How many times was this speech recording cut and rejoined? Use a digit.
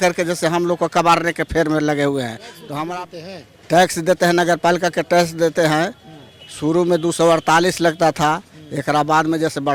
1